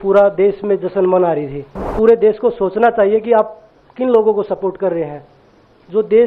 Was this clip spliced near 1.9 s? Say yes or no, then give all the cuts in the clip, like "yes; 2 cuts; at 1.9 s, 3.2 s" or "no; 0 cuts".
yes; 1 cut; at 1.9 s